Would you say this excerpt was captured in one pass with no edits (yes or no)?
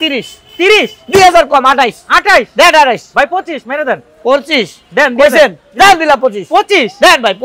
yes